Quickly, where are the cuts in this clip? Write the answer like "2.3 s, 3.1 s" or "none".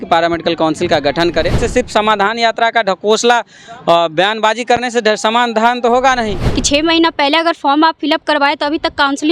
1.6 s, 6.5 s